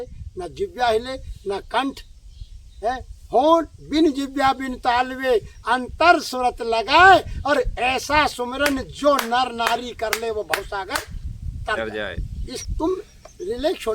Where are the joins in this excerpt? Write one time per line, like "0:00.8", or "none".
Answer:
0:12.7